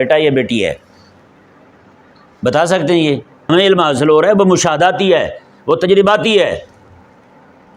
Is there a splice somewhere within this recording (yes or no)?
yes